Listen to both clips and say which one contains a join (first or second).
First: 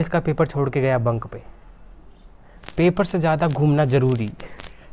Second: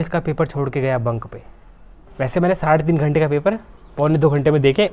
second